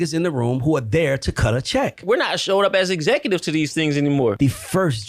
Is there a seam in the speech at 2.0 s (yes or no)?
yes